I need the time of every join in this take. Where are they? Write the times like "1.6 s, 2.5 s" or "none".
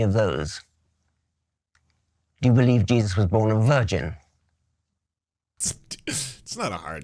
5.5 s

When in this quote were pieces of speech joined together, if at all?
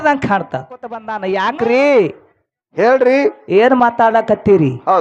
1.1 s

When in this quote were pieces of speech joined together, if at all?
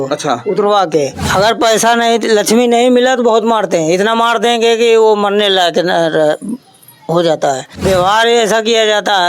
1.2 s, 7.7 s

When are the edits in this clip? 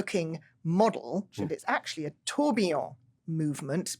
1.5 s

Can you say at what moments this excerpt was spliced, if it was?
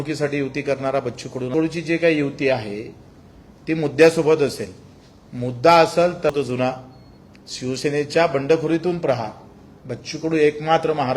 1.5 s, 6.3 s

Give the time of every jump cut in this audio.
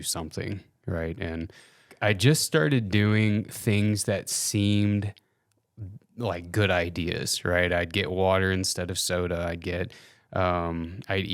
1.9 s

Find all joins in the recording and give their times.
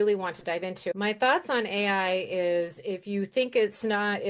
0.9 s

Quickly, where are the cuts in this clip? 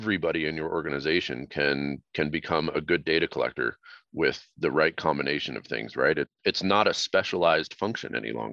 6.3 s

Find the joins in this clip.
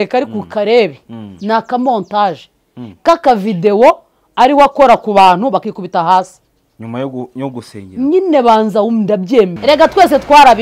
9.5 s

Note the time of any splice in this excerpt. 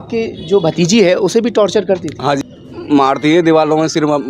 2.6 s

